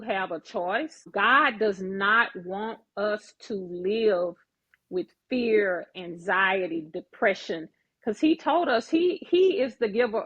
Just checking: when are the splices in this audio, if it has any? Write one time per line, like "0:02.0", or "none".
0:01.0